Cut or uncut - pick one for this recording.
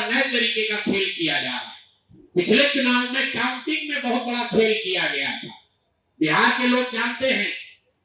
uncut